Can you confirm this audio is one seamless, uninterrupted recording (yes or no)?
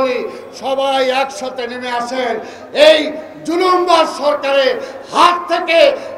yes